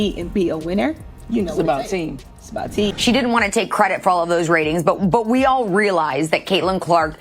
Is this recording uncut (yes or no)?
no